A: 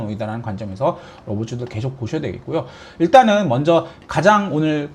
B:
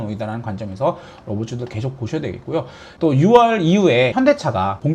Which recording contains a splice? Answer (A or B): B